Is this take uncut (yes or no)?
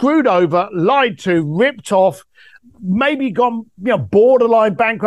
yes